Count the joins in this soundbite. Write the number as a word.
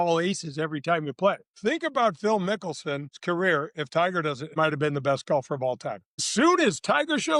four